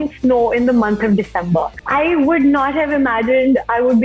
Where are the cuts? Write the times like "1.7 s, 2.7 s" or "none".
1.8 s